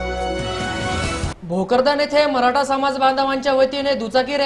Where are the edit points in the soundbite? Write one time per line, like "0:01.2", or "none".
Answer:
0:01.2